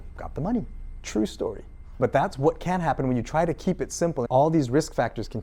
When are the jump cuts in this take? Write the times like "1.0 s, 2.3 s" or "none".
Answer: 2.0 s, 4.3 s